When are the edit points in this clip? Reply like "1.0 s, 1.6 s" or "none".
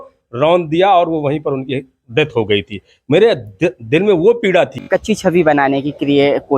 4.9 s